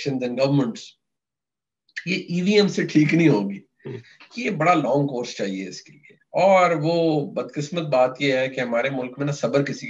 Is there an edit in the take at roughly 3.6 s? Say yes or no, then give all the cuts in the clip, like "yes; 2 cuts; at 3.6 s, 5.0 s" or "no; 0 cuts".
no; 0 cuts